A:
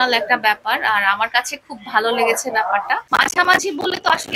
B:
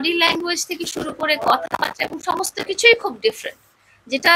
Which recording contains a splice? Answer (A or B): A